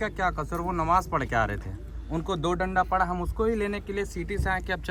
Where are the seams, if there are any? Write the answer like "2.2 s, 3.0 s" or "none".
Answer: none